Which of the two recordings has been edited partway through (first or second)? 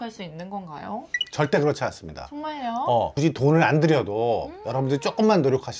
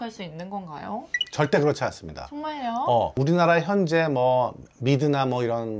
first